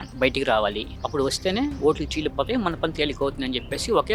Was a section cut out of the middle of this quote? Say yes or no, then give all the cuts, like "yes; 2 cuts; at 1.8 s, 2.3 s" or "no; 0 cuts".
no; 0 cuts